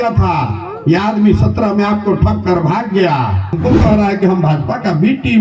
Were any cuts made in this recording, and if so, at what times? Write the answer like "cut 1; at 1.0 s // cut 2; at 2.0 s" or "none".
cut 1; at 3.6 s

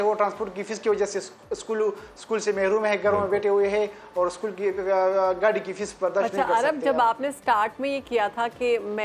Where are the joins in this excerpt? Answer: none

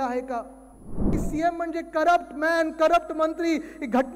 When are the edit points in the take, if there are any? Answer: cut 1; at 1.1 s

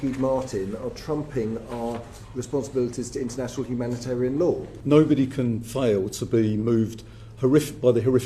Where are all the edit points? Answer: cut 1; at 4.7 s

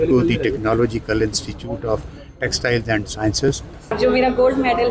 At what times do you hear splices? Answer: cut 1; at 4.0 s

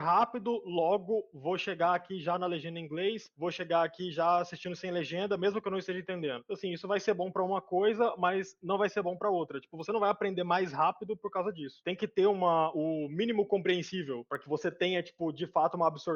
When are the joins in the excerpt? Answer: none

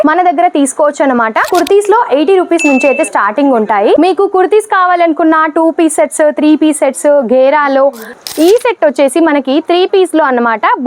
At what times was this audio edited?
cut 1; at 1.4 s // cut 2; at 8.1 s

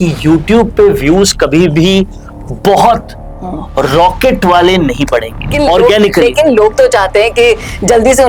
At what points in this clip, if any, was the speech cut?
cut 1; at 5.5 s

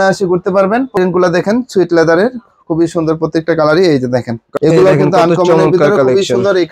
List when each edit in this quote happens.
cut 1; at 1.0 s // cut 2; at 4.4 s

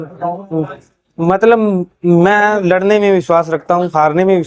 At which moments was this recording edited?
none

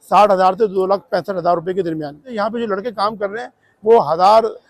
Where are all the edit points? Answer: cut 1; at 2.2 s

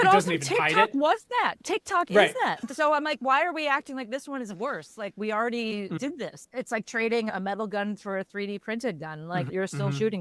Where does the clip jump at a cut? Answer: cut 1; at 6.4 s // cut 2; at 7.3 s // cut 3; at 9.5 s

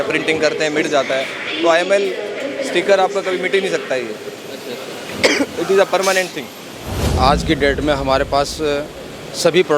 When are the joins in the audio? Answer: cut 1; at 7.0 s

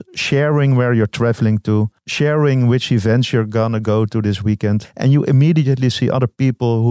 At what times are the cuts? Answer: cut 1; at 2.0 s // cut 2; at 4.9 s

